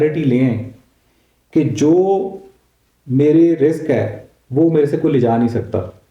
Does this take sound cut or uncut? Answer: uncut